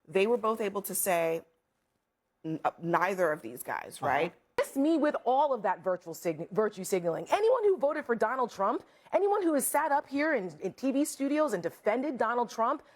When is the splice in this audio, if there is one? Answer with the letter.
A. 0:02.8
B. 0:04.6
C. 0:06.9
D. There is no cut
B